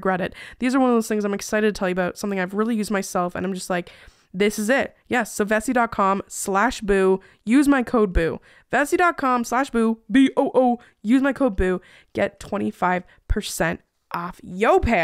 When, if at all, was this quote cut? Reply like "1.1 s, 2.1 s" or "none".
none